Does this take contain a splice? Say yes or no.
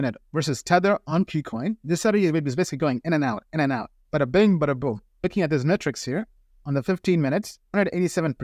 no